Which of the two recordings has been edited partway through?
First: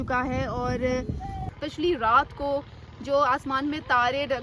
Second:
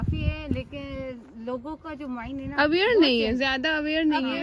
first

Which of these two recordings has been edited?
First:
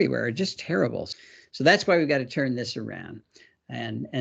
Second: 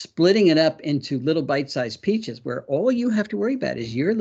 first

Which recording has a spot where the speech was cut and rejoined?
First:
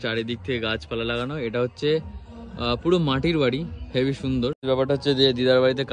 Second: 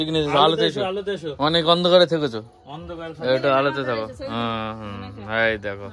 first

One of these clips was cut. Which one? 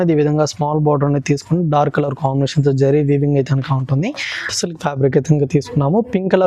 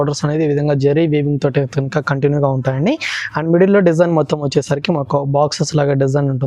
first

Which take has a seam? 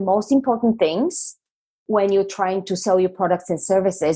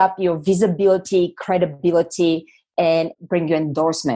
second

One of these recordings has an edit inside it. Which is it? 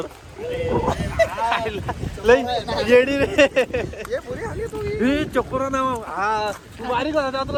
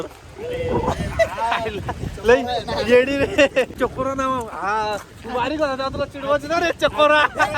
second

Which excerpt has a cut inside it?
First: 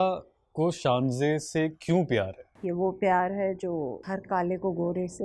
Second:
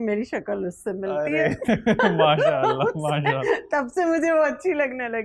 first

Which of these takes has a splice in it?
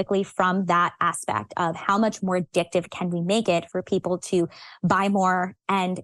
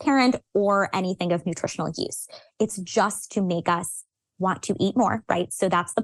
first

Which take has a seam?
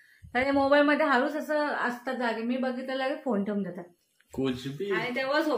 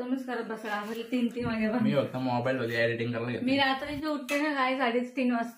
first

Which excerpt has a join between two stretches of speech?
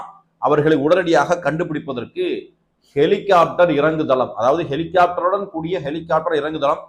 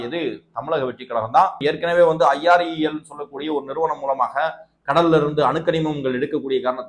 second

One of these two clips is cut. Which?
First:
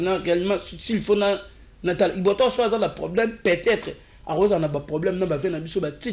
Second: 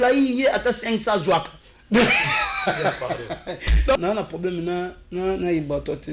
second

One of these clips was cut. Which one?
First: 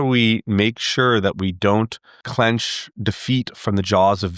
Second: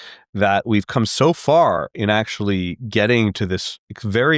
first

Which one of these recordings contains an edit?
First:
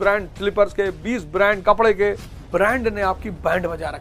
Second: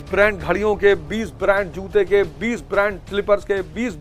first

